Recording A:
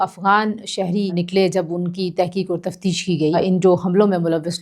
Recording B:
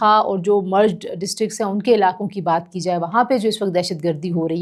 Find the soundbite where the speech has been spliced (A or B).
A